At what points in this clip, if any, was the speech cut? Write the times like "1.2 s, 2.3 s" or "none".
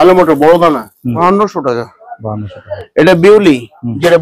1.0 s